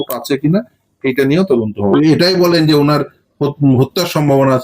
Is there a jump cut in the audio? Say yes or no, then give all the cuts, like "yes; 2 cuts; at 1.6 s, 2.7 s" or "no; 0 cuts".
yes; 1 cut; at 1.9 s